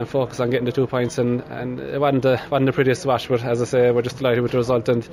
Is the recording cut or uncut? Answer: uncut